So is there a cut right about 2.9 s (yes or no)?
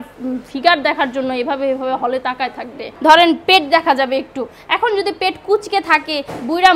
yes